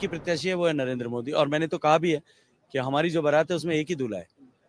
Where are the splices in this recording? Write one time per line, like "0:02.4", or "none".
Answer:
none